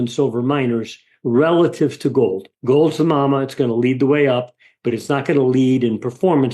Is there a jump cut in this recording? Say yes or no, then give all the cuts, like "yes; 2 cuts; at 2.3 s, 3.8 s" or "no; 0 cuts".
yes; 1 cut; at 2.5 s